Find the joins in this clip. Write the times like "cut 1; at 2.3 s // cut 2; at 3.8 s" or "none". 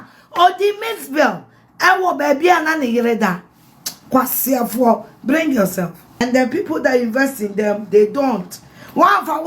cut 1; at 6.0 s